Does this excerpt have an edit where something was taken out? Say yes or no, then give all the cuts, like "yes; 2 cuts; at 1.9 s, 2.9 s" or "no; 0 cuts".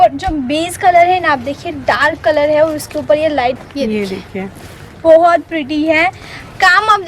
yes; 1 cut; at 3.6 s